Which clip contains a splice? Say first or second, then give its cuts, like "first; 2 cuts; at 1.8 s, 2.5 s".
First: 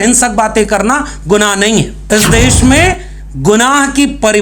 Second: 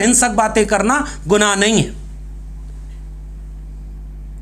first; 1 cut; at 2.0 s